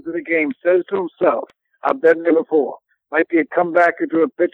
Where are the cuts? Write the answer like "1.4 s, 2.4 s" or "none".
none

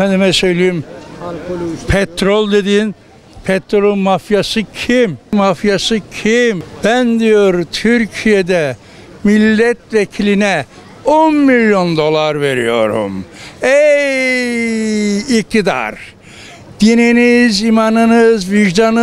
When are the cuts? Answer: 5.3 s, 6.7 s

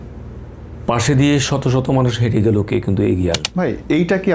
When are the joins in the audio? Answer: 3.4 s

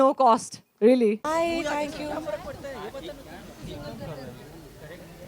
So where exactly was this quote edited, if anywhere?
1.2 s

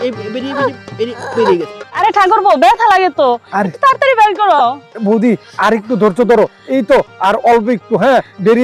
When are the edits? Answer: 1.8 s

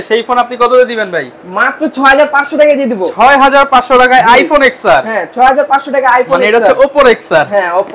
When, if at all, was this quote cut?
none

